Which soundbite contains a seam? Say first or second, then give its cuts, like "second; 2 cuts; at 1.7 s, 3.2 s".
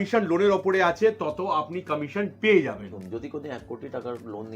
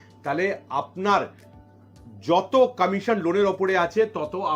first; 1 cut; at 3.0 s